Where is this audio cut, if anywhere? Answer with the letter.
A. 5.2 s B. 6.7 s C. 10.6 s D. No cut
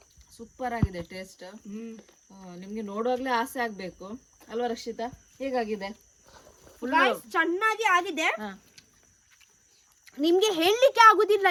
D